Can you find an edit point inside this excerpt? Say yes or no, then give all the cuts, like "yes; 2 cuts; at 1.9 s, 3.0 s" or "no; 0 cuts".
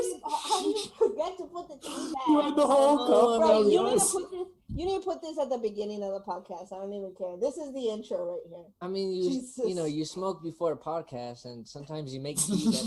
no; 0 cuts